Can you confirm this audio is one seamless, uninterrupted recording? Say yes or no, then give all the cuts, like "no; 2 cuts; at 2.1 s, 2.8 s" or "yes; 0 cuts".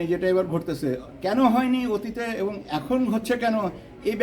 no; 1 cut; at 1.1 s